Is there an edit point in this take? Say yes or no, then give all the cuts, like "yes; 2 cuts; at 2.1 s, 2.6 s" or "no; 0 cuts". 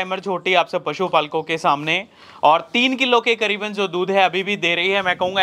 no; 0 cuts